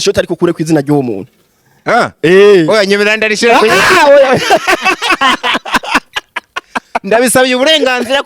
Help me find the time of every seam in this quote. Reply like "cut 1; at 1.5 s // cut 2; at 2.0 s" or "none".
none